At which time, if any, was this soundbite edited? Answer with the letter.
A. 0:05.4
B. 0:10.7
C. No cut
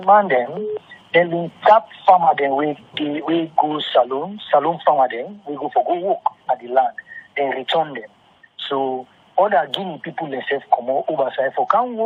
C